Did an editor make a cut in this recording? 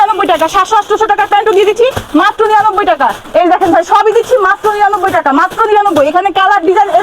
no; 0 cuts

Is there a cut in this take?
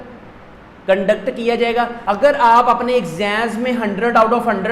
no; 0 cuts

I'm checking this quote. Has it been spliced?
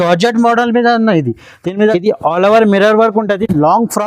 yes; 1 cut; at 1.9 s

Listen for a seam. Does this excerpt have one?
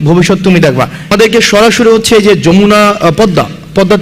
yes; 1 cut; at 1.1 s

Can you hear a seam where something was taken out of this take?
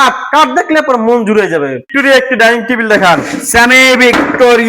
yes; 1 cut; at 1.8 s

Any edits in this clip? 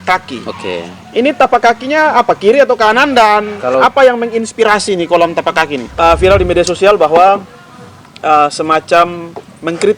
yes; 1 cut; at 5.9 s

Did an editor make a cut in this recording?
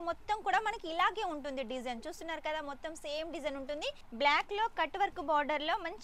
yes; 1 cut; at 4.0 s

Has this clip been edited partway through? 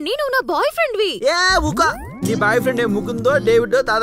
no; 0 cuts

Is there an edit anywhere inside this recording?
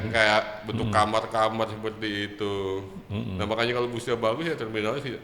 no; 0 cuts

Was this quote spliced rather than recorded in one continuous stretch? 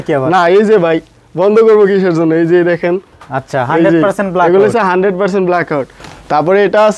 yes; 1 cut; at 6.0 s

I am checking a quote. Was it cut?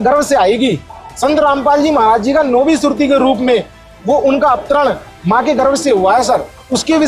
no; 0 cuts

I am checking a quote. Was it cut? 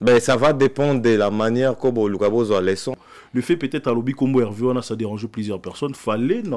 yes; 1 cut; at 3.1 s

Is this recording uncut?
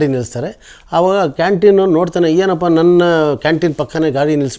yes; 0 cuts

